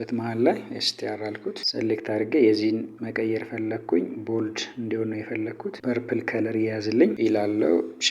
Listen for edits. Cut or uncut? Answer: cut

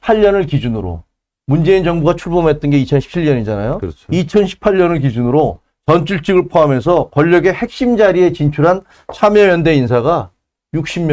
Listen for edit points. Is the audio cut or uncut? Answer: uncut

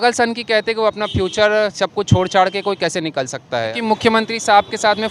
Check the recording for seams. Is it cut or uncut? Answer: cut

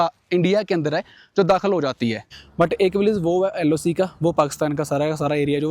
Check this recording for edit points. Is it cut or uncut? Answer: cut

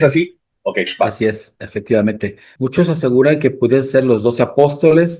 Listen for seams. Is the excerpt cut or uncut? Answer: cut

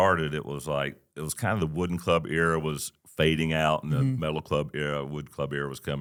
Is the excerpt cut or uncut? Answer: uncut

